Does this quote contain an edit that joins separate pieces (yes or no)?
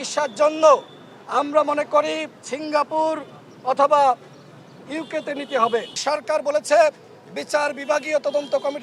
yes